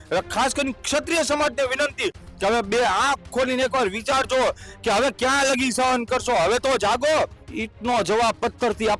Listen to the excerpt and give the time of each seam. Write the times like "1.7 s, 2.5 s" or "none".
7.4 s

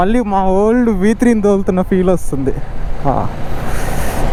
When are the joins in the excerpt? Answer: none

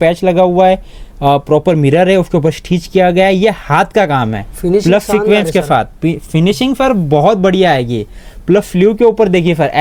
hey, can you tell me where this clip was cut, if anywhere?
none

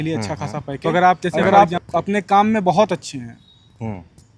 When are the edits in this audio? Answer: 1.3 s

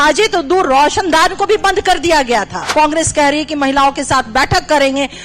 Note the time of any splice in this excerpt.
2.6 s

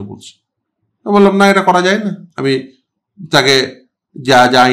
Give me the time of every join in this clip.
2.3 s

